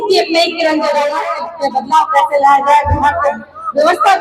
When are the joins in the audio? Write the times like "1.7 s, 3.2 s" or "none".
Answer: 1.3 s